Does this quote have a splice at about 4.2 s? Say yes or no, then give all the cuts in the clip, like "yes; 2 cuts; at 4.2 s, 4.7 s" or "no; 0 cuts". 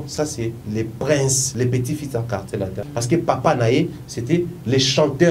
no; 2 cuts; at 1.4 s, 2.8 s